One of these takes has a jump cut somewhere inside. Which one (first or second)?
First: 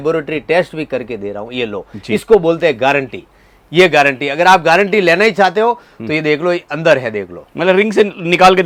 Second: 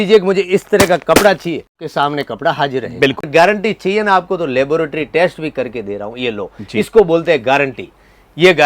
second